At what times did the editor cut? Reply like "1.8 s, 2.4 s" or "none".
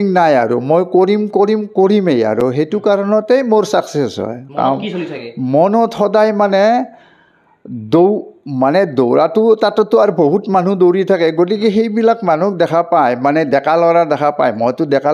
none